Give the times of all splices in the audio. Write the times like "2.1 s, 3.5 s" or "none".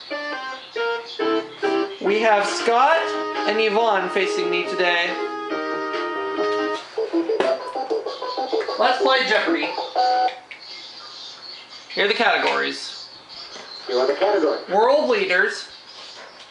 none